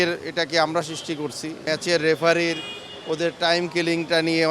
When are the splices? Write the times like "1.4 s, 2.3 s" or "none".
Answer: 1.6 s

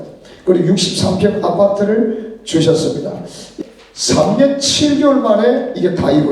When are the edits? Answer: 3.5 s

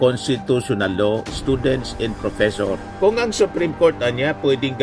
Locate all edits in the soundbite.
2.8 s

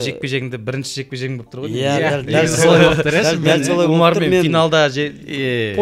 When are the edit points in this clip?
none

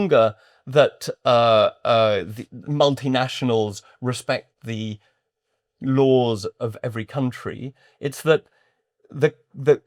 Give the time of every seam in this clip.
none

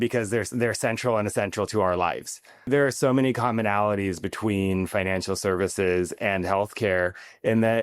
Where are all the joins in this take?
2.7 s

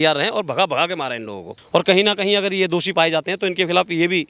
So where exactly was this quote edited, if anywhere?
1.5 s

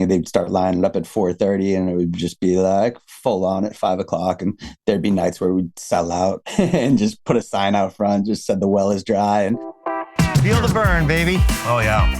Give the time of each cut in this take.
6.4 s, 9.7 s

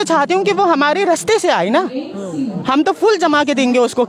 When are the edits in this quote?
none

